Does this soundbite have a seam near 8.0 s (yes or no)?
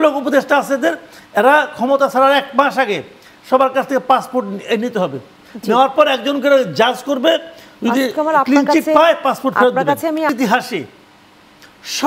no